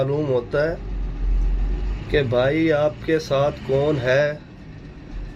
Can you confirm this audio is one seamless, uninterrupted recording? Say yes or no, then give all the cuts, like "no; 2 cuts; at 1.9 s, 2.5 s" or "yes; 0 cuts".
yes; 0 cuts